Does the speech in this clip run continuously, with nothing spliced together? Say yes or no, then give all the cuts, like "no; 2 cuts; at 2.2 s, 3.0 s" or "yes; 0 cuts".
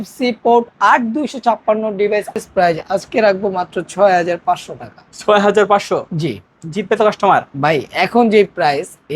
no; 1 cut; at 2.4 s